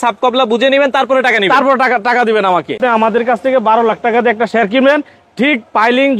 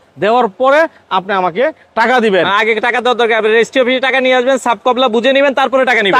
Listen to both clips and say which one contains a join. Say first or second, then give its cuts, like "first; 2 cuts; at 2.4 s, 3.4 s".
first; 1 cut; at 2.8 s